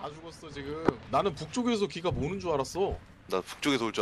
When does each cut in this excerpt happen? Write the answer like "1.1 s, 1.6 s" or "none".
1.0 s